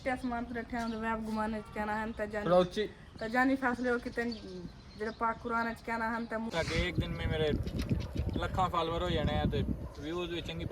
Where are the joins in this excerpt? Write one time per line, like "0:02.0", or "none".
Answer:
0:06.5